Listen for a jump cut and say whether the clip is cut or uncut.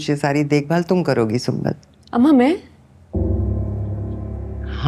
cut